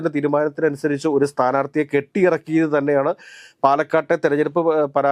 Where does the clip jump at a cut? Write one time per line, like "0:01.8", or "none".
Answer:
none